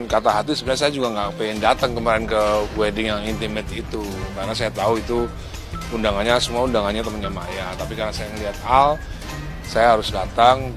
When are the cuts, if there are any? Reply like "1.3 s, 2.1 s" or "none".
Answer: none